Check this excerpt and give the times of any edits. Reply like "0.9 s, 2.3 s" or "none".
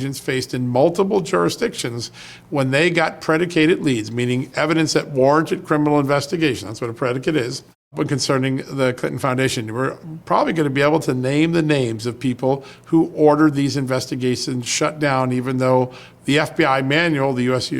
7.9 s